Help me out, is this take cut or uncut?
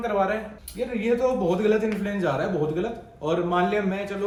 uncut